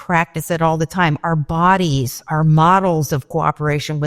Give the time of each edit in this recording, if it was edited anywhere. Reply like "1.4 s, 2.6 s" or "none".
2.2 s